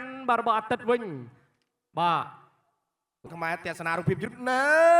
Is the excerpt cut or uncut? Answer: cut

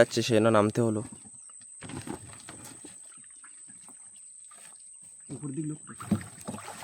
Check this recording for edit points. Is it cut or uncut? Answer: uncut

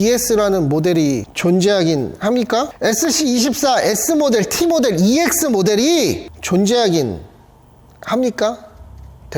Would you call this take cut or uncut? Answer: cut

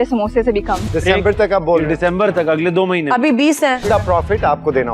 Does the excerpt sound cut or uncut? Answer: cut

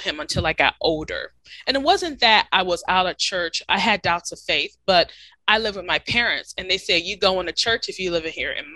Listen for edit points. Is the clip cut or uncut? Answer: uncut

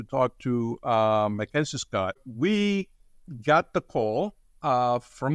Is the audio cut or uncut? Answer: cut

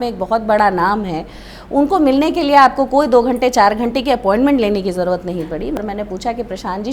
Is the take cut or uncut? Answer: cut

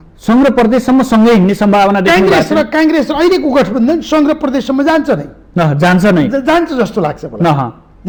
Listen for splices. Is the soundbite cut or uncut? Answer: uncut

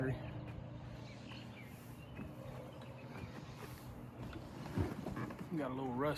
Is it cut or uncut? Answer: uncut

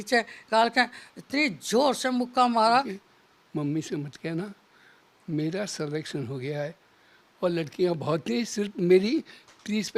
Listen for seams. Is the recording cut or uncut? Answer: cut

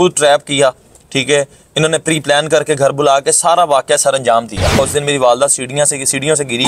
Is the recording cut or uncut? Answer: cut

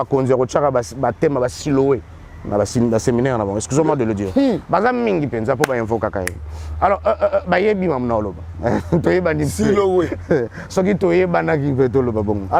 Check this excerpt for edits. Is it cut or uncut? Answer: uncut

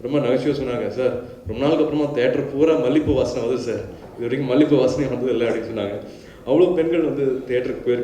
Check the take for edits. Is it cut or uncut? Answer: uncut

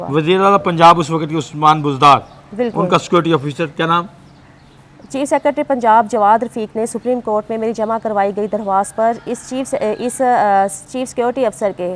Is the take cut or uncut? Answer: uncut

